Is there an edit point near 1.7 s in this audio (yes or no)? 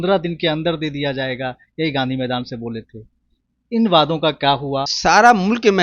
no